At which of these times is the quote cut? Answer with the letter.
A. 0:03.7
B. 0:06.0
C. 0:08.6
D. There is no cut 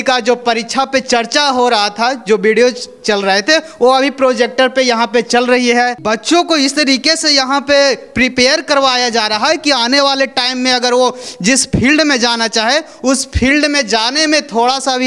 B